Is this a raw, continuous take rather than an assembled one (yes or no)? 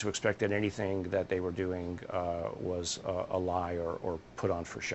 yes